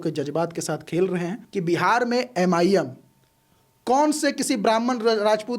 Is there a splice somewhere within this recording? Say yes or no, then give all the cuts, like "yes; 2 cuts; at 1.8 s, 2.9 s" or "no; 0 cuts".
yes; 1 cut; at 1.4 s